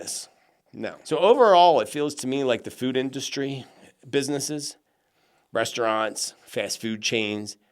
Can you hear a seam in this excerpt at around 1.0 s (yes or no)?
yes